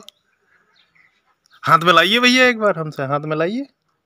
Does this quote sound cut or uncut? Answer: uncut